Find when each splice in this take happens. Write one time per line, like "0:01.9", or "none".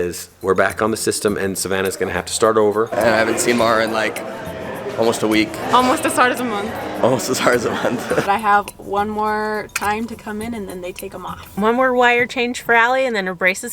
0:02.9
0:05.6
0:08.2
0:11.4